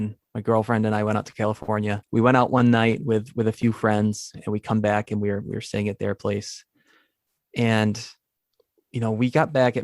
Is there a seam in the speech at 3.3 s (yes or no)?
no